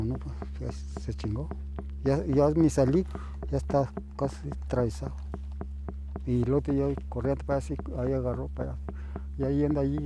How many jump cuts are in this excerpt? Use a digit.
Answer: 0